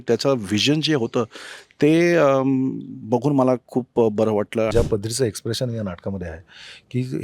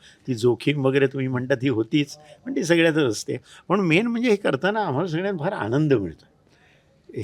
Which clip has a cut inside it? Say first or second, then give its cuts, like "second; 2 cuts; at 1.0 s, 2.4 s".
first; 1 cut; at 4.7 s